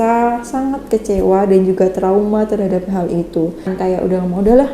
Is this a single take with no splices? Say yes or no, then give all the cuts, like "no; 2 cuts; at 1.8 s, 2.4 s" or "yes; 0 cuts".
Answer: no; 1 cut; at 3.7 s